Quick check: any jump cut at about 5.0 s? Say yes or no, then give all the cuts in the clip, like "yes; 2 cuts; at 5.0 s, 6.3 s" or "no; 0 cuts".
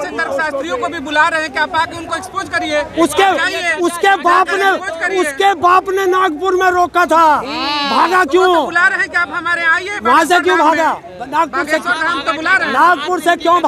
no; 0 cuts